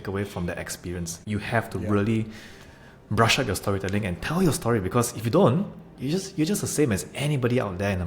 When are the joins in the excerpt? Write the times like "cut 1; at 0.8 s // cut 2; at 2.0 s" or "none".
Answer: cut 1; at 1.2 s